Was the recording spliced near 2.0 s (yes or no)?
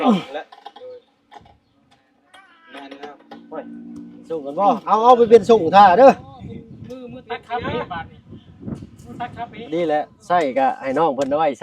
no